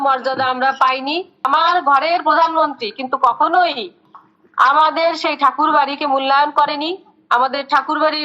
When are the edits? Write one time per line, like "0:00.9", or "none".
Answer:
0:01.5